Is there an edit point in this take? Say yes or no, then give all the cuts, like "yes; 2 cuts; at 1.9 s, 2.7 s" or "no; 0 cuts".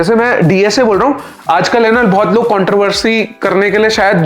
yes; 1 cut; at 1.3 s